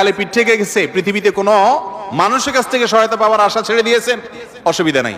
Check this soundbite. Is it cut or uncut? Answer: uncut